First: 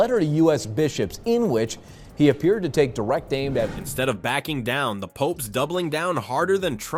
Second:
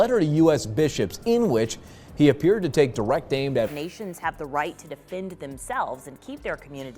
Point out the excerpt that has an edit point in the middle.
second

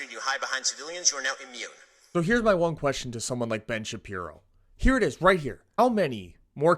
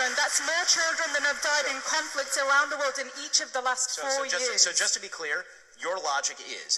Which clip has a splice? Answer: first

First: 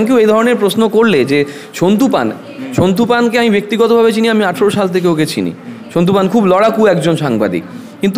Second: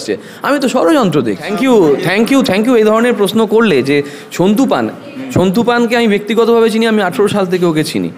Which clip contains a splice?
second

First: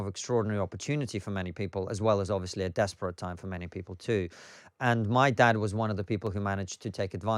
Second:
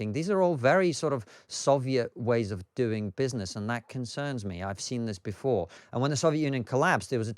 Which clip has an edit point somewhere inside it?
second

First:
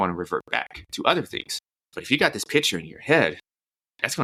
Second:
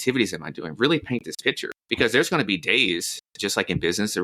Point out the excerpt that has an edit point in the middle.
second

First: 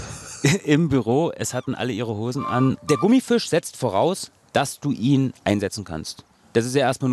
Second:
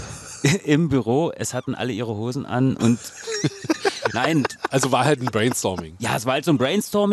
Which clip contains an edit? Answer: first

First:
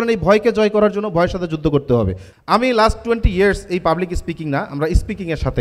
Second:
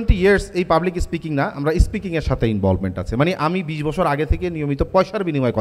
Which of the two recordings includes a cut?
first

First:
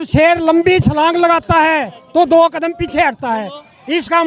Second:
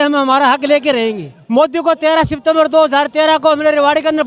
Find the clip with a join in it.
second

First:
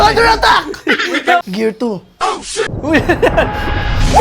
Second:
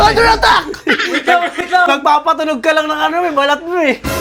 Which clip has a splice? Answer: first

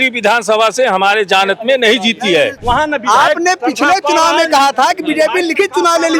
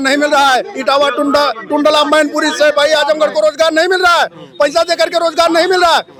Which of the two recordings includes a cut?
first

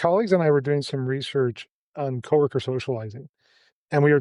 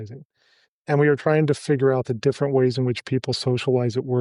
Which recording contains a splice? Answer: first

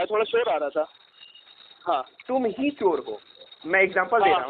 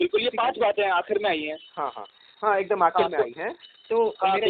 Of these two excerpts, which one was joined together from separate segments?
first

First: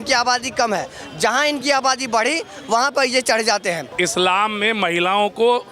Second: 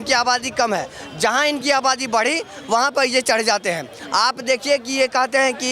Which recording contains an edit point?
first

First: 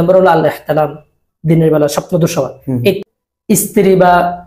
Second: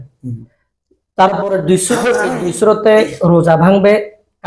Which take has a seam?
first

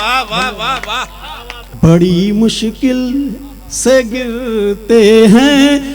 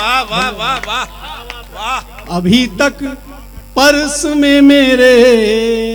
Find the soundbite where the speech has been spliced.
first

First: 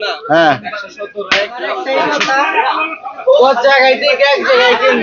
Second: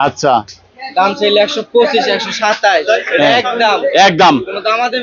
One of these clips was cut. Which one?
first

